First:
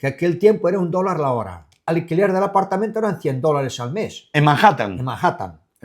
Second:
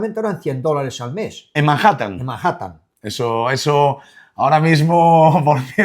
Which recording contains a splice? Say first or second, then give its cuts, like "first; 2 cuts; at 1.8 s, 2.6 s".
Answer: first; 1 cut; at 1.9 s